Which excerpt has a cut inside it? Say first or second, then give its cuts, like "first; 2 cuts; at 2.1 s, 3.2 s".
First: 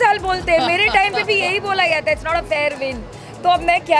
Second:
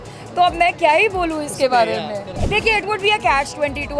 second; 1 cut; at 2.3 s